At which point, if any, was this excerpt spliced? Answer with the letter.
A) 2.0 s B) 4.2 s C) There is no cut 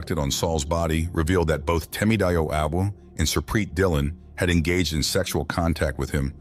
C